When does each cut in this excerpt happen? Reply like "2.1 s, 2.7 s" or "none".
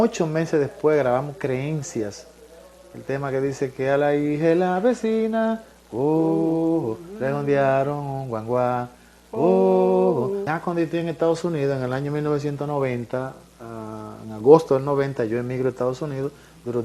10.5 s